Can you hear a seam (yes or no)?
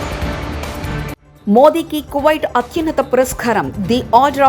yes